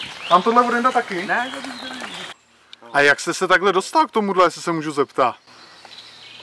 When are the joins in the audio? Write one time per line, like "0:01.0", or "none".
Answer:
0:02.8